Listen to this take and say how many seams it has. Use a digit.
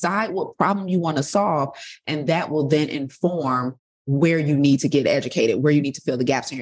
0